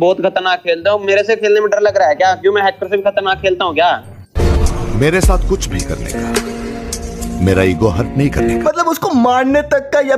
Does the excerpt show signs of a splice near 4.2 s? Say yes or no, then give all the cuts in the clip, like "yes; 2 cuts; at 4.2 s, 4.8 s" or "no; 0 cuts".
yes; 2 cuts; at 4.2 s, 8.6 s